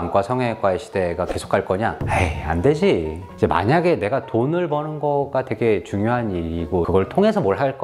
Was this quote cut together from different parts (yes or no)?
yes